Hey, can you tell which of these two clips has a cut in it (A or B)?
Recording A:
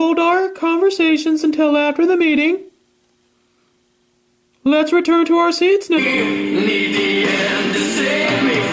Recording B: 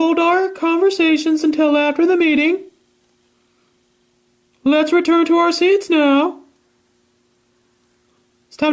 B